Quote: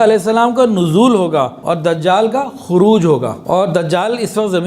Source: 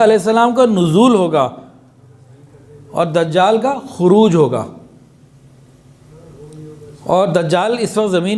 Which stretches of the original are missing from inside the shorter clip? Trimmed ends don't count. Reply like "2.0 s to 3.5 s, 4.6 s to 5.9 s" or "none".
1.6 s to 2.9 s, 4.7 s to 7.0 s